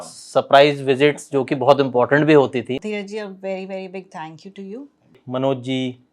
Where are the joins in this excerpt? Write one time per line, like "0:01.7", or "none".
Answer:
0:02.8
0:05.2